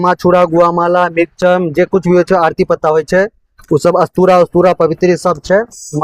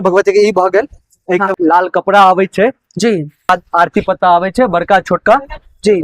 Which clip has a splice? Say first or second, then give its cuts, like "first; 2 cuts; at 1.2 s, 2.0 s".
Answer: second; 2 cuts; at 1.5 s, 3.5 s